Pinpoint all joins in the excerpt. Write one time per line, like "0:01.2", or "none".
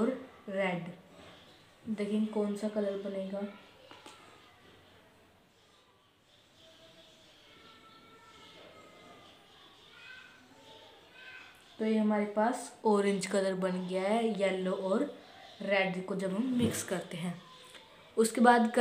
0:06.1

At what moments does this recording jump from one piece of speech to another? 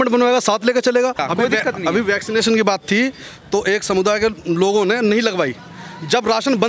0:01.2

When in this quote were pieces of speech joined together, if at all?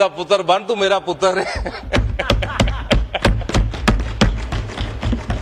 none

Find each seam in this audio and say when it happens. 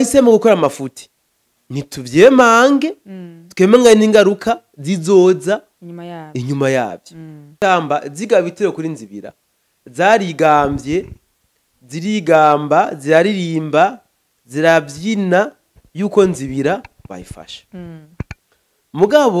0:07.6

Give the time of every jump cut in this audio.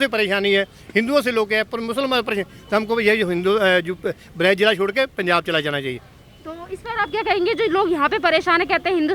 none

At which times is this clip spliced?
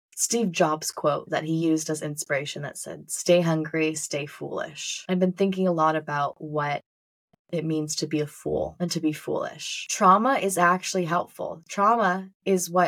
0:01.2
0:09.9

